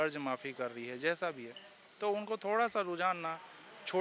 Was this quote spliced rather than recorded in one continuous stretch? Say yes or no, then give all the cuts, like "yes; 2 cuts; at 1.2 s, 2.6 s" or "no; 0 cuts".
no; 0 cuts